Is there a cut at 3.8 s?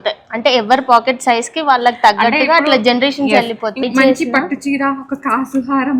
yes; 1 cut; at 3.8 s

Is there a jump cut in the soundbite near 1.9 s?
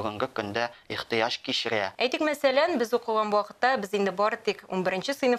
yes; 1 cut; at 1.9 s

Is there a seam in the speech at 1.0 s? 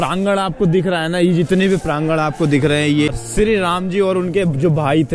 no; 1 cut; at 3.1 s

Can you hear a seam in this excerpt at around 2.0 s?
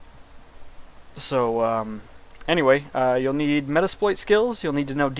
yes; 1 cut; at 2.0 s

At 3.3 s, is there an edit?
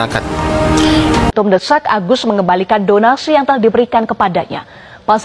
no; 1 cut; at 1.3 s

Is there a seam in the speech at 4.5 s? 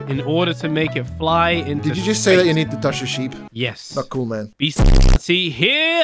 yes; 2 cuts; at 3.4 s, 4.5 s

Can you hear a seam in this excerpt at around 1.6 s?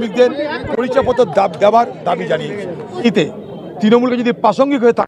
no; 1 cut; at 3.0 s

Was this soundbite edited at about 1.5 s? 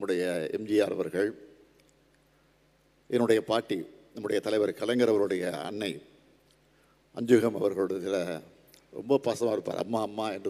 no; 0 cuts

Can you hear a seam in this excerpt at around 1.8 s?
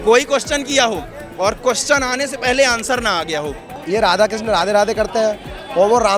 no; 1 cut; at 3.8 s

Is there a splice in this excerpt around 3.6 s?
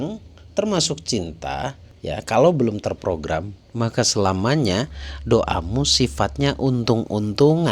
no; 1 cut; at 1.9 s

